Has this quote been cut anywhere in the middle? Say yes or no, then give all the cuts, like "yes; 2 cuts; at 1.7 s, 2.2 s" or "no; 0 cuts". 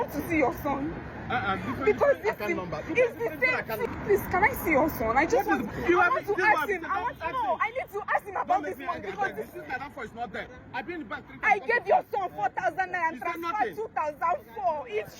no; 0 cuts